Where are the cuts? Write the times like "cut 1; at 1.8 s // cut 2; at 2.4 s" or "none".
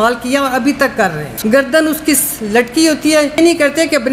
cut 1; at 1.2 s // cut 2; at 3.4 s